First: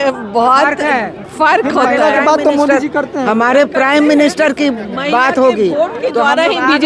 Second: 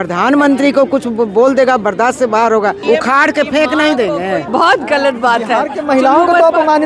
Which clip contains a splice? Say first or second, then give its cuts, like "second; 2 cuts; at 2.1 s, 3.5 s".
second; 2 cuts; at 2.8 s, 4.5 s